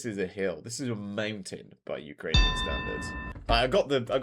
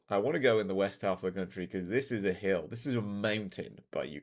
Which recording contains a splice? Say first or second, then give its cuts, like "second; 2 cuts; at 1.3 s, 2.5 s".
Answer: first; 1 cut; at 3.2 s